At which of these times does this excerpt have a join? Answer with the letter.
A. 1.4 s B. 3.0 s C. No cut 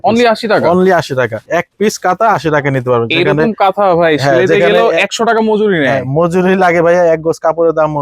A